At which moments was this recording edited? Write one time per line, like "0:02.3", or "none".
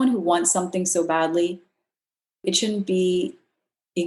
0:02.4